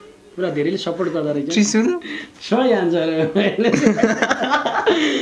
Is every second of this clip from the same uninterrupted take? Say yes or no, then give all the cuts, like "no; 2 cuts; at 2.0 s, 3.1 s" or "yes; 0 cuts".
yes; 0 cuts